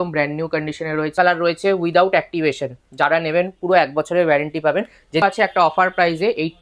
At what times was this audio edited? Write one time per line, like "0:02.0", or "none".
0:01.1
0:05.2